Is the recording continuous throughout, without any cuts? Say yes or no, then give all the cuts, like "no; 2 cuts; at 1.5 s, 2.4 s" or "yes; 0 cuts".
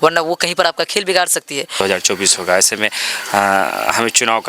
no; 1 cut; at 1.7 s